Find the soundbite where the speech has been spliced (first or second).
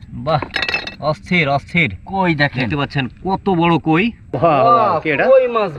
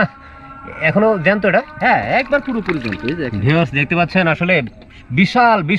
first